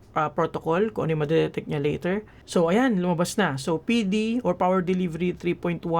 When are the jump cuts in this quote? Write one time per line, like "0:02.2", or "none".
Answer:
0:02.3

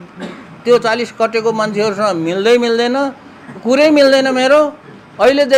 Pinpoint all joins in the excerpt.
none

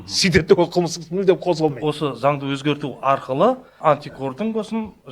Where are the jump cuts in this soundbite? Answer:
0:01.8

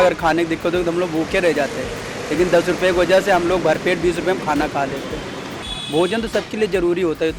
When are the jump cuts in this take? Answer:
none

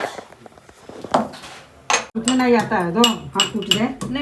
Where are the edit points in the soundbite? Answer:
0:02.1

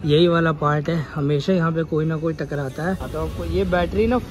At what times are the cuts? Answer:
0:03.1

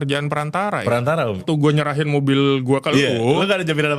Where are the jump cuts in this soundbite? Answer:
0:01.4

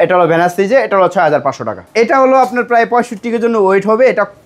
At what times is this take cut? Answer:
0:01.9

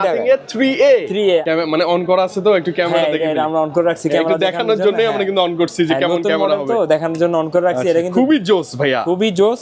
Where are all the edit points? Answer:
0:01.4

